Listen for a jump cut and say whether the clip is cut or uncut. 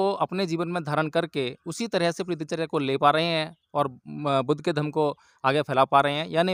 uncut